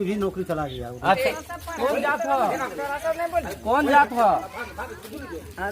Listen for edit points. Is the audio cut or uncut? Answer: cut